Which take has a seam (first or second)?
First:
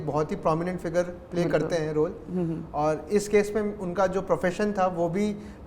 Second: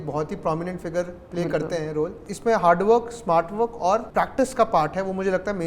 second